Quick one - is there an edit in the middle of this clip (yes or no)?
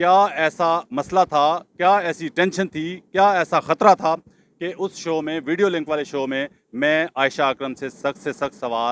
no